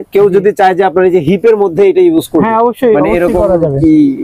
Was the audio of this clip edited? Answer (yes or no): no